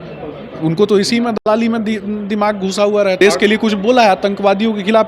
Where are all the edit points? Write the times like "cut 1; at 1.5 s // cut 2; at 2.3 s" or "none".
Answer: cut 1; at 3.2 s